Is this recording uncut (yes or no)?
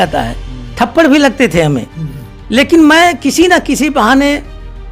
yes